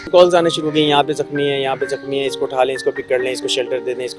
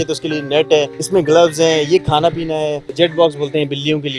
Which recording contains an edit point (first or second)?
second